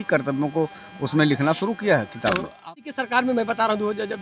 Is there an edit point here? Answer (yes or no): yes